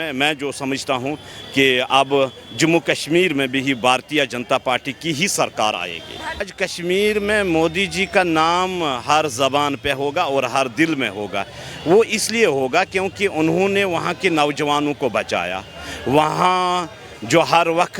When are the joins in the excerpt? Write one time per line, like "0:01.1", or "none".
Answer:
0:06.5